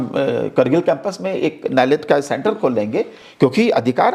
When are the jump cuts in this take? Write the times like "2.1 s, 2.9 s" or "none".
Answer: none